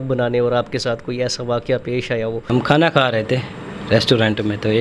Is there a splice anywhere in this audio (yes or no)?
yes